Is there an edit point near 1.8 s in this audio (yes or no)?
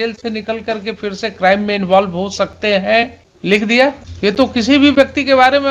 no